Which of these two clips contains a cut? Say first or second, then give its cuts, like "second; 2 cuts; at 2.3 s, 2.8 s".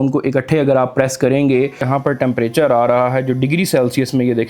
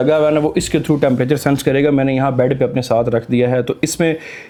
first; 1 cut; at 1.9 s